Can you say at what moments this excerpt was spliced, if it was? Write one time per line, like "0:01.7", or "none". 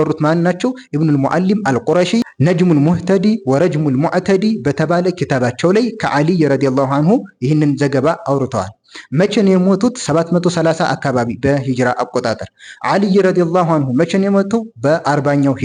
none